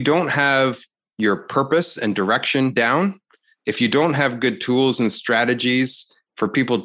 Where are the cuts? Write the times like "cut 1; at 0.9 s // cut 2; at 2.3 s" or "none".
cut 1; at 2.7 s